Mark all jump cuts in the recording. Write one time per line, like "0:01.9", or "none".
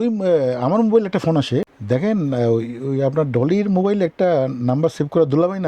0:01.8